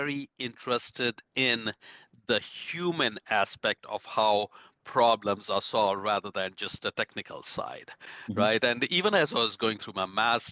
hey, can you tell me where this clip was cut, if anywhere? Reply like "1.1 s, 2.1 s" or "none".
none

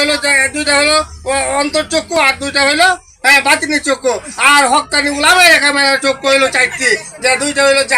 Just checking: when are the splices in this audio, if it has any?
none

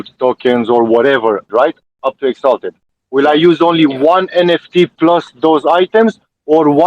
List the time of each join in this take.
1.5 s, 2.8 s

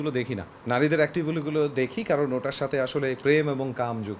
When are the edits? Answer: 3.2 s

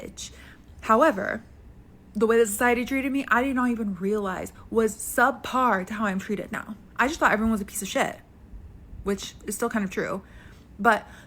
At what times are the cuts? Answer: 3.3 s, 10.3 s

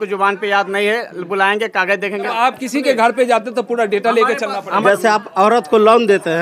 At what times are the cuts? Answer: 2.3 s, 4.8 s

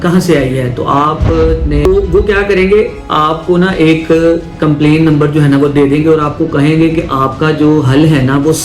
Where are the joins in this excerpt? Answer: 1.9 s

